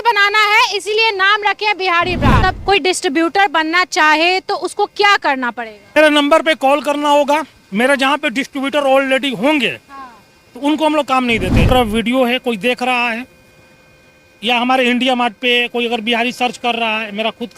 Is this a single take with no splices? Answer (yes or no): no